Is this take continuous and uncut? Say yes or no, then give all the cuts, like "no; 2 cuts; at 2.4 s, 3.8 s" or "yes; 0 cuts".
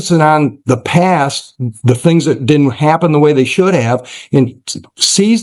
yes; 0 cuts